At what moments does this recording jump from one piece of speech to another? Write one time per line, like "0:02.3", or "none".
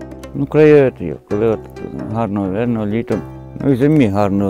none

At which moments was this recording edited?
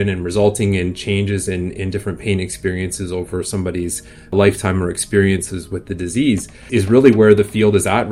0:04.3
0:06.7

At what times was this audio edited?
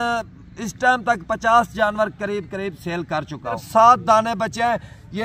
0:03.6

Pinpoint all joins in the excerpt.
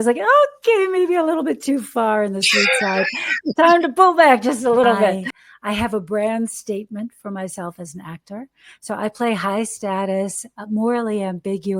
0:05.3

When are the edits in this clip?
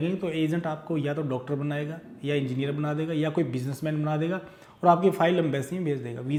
none

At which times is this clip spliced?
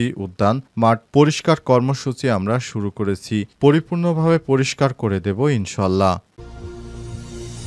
0:06.3

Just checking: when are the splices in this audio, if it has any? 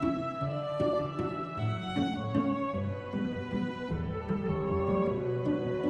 none

